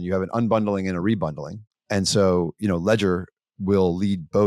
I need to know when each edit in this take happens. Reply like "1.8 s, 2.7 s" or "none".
1.7 s